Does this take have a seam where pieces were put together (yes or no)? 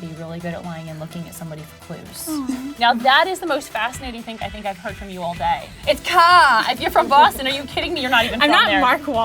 yes